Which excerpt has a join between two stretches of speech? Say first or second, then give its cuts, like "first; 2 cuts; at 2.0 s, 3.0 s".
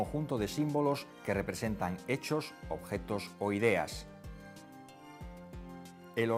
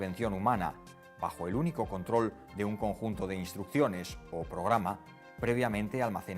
second; 1 cut; at 4.4 s